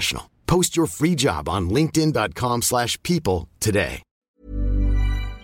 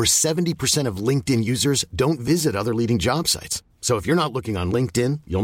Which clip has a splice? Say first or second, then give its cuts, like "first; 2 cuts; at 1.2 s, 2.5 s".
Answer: first; 1 cut; at 4.2 s